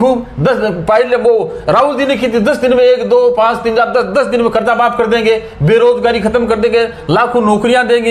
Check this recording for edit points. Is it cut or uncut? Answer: uncut